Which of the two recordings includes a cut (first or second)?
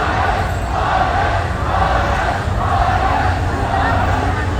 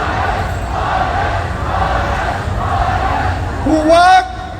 second